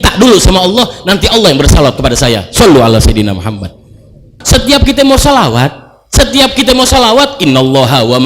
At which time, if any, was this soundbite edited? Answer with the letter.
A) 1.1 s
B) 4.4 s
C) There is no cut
B